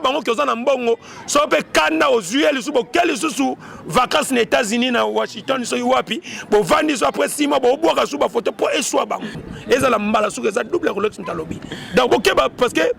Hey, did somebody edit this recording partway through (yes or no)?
yes